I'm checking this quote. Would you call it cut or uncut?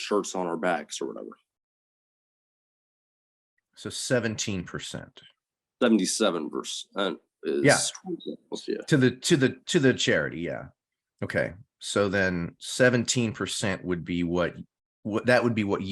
uncut